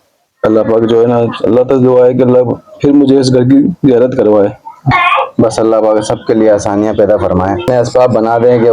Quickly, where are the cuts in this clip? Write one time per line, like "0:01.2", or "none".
0:04.9
0:07.7